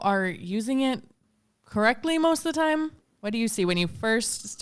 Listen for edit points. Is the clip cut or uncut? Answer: cut